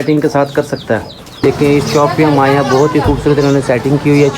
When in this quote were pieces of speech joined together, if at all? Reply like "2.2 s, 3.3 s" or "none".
1.2 s